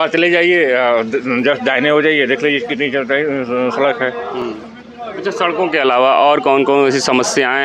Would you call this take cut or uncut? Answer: uncut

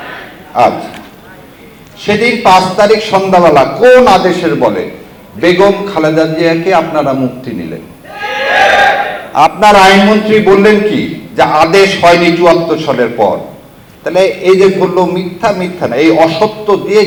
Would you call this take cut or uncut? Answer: uncut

